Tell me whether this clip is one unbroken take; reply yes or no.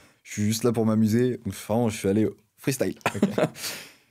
yes